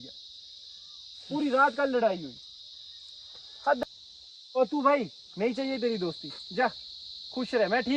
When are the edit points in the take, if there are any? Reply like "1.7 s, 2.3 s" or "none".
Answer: 3.8 s